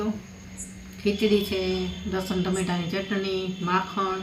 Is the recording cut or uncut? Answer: uncut